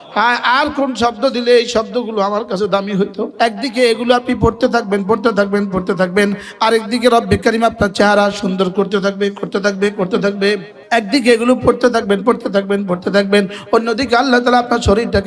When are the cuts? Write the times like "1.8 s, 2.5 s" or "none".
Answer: 3.3 s, 10.7 s